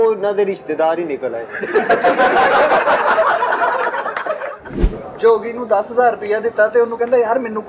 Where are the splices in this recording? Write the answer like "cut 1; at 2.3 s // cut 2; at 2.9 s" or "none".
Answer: cut 1; at 4.8 s